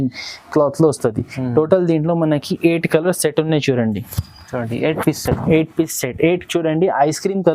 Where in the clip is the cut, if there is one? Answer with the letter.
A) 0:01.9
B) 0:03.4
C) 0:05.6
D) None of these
D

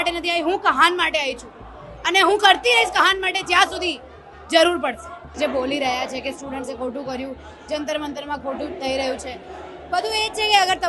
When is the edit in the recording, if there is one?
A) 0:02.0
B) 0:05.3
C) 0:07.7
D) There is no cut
B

